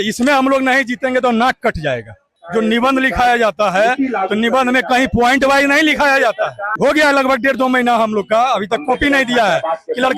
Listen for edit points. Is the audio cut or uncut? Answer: cut